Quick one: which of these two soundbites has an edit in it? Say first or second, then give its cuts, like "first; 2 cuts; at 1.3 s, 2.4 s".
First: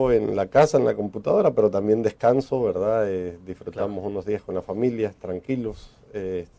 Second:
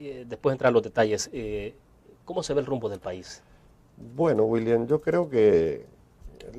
first; 1 cut; at 4.1 s